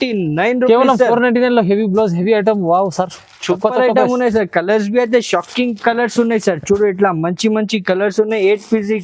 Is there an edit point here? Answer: no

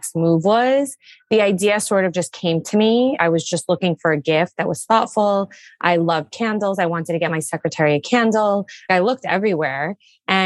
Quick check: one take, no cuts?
no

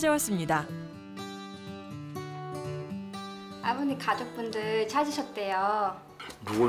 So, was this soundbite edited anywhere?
no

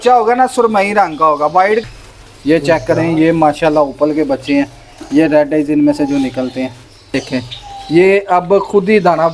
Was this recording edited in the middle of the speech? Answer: yes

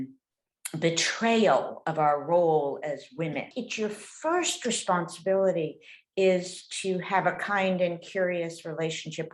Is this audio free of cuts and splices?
no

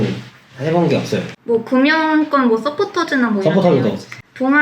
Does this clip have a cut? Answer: yes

